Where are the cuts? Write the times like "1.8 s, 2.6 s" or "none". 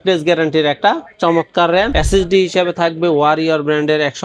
2.0 s